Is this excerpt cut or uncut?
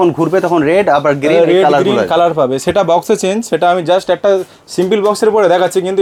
uncut